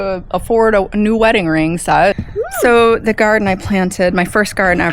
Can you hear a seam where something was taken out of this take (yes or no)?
yes